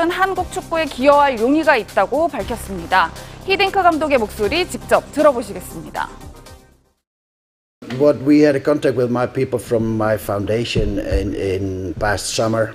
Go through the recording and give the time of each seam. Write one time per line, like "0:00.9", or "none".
none